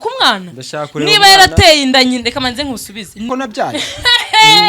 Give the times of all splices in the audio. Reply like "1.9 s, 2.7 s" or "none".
3.3 s